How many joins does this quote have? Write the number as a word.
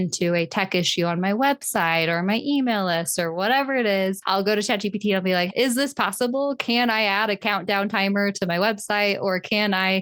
zero